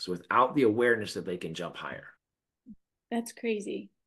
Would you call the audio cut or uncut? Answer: uncut